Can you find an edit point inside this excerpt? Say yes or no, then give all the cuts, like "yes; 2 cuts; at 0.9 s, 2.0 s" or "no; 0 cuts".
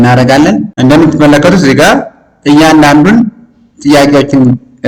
no; 0 cuts